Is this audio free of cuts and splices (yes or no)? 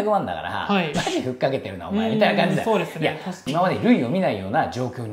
no